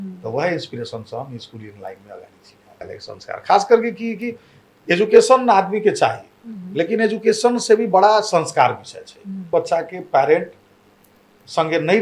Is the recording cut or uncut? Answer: cut